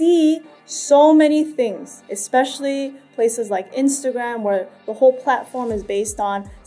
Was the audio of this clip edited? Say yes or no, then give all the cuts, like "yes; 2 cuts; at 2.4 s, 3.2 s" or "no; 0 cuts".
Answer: no; 0 cuts